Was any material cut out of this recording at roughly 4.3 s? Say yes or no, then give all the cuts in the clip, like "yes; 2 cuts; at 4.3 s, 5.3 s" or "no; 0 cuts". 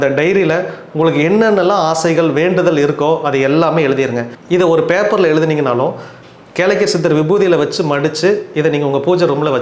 yes; 1 cut; at 4.3 s